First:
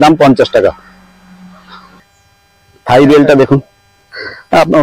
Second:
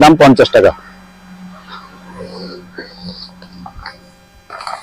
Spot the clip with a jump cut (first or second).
first